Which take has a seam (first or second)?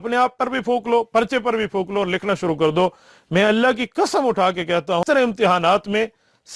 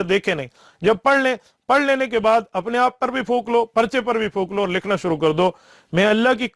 first